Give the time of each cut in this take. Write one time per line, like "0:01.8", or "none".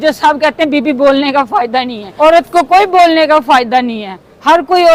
0:02.0